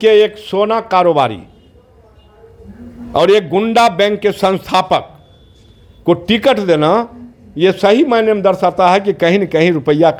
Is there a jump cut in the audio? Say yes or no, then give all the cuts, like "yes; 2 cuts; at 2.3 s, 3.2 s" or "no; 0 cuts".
no; 0 cuts